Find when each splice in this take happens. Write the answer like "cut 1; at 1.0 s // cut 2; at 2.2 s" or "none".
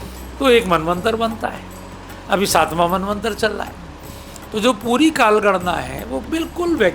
none